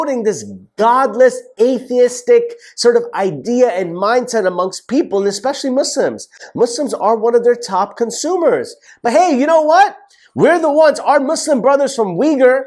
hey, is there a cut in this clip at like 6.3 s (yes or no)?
no